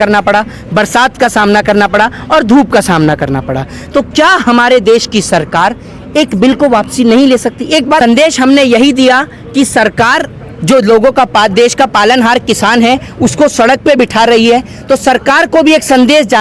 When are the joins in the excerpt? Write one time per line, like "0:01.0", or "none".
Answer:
0:08.0